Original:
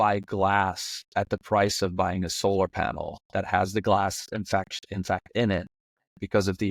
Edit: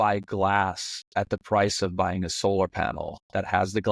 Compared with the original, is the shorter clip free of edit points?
yes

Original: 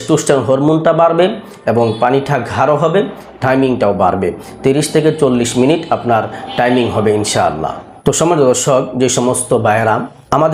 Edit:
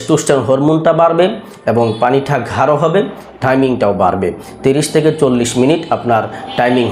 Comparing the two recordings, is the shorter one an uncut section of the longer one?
yes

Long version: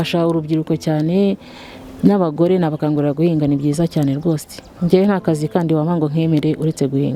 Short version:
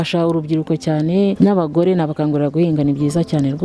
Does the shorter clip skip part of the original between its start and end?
yes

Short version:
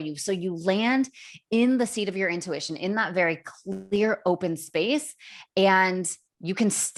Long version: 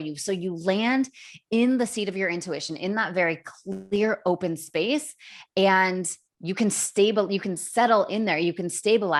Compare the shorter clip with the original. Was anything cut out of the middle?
no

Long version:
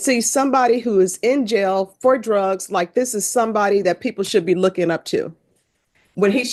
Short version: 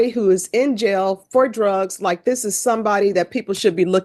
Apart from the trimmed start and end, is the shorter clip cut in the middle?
no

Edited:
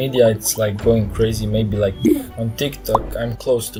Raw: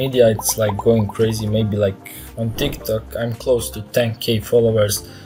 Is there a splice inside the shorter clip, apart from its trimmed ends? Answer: no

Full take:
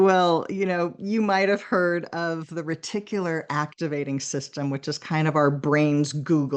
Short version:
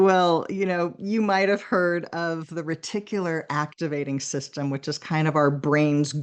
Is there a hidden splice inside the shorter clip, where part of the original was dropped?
no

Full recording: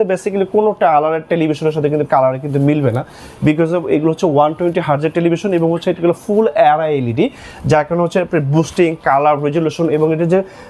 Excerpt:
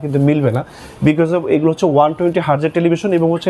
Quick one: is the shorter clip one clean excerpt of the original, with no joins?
yes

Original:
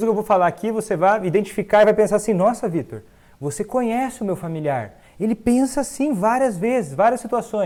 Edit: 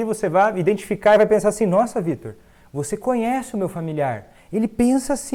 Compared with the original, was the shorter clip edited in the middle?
no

